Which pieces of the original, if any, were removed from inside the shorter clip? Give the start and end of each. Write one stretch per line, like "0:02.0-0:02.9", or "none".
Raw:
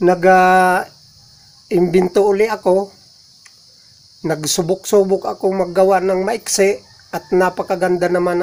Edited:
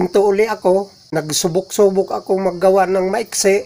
0:03.0-0:04.1